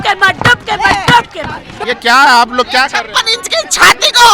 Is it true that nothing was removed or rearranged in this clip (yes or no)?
no